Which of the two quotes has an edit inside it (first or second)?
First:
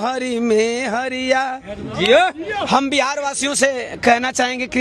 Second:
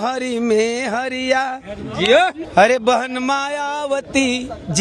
second